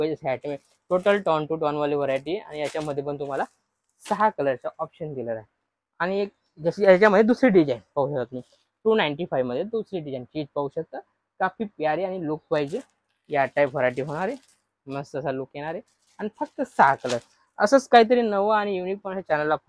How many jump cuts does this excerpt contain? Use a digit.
0